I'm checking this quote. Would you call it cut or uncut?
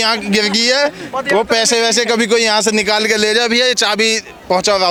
uncut